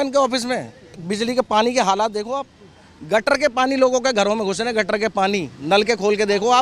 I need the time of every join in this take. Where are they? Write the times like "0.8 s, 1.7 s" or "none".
1.1 s